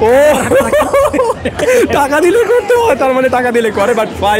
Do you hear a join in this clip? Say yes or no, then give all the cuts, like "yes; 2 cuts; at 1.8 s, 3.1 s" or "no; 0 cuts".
no; 0 cuts